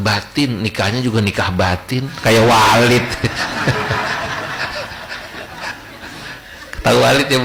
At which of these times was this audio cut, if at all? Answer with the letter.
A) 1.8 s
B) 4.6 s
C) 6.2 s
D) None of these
D